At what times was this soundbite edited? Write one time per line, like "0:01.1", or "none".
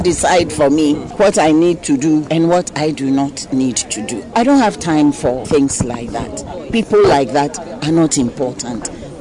0:01.1
0:02.3
0:04.3
0:05.4